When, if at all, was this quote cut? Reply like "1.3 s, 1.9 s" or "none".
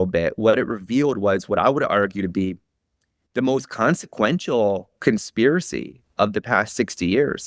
none